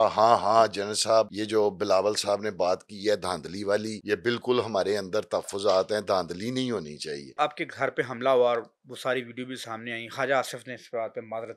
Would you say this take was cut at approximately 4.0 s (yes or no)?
yes